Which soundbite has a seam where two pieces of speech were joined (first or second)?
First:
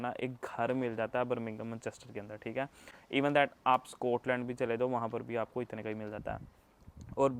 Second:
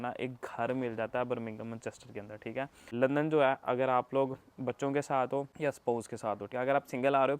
second